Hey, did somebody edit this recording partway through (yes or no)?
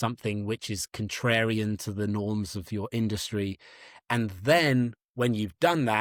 no